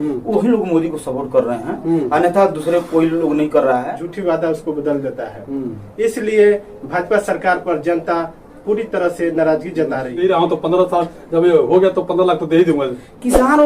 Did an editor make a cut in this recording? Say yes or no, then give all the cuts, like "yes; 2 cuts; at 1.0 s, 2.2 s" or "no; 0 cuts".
yes; 2 cuts; at 4.0 s, 10.2 s